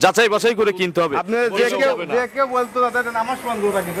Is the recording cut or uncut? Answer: cut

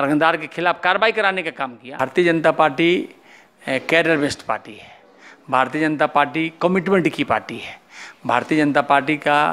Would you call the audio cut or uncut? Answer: cut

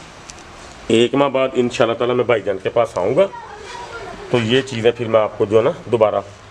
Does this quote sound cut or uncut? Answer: uncut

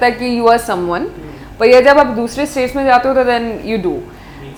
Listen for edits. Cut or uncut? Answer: uncut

